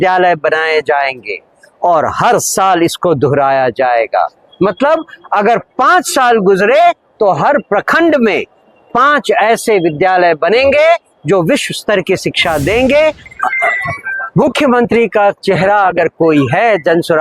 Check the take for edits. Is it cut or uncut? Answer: cut